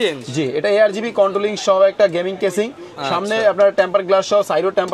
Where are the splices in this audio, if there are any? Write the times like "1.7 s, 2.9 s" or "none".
none